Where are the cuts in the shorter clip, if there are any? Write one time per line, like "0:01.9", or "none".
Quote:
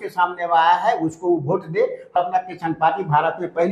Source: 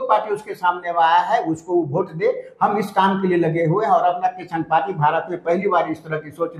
0:02.1